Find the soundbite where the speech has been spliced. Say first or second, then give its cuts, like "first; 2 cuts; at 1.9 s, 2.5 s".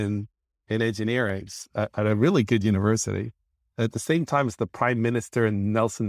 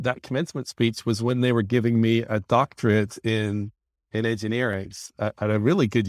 first; 1 cut; at 3.6 s